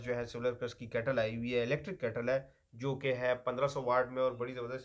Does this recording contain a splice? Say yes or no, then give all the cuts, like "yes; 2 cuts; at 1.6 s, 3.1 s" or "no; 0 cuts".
no; 0 cuts